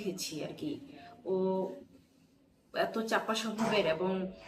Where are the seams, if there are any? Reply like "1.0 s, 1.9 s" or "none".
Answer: none